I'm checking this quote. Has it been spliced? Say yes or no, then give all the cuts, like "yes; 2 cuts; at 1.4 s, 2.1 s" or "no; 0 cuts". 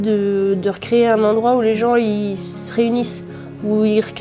no; 0 cuts